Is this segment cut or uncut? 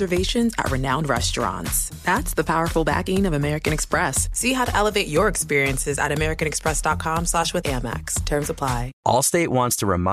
cut